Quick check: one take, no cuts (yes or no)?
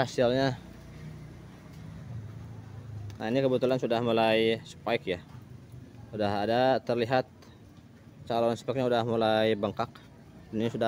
yes